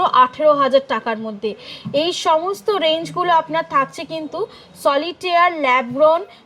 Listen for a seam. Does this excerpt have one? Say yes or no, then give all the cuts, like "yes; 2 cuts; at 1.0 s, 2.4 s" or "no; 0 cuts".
no; 0 cuts